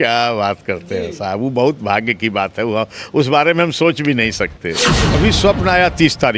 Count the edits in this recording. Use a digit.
1